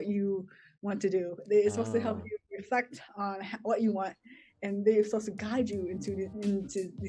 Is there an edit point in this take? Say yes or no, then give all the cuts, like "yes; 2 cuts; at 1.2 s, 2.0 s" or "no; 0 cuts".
no; 0 cuts